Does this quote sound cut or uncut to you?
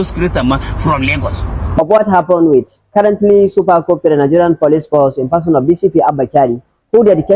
cut